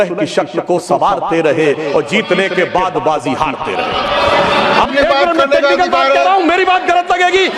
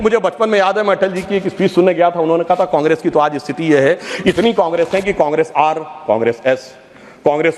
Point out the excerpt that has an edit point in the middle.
first; 1 cut; at 4.9 s

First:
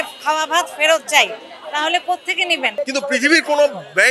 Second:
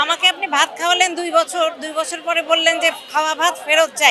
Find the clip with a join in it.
first; 1 cut; at 2.7 s

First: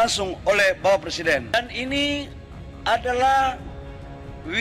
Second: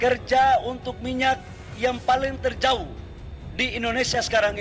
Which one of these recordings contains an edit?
first; 1 cut; at 1.5 s

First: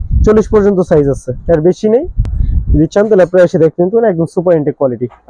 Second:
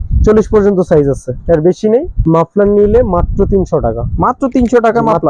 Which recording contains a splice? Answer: second; 1 cut; at 2.1 s

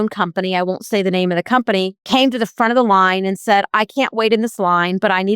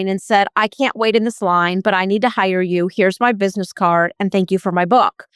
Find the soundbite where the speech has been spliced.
first; 1 cut; at 2.0 s

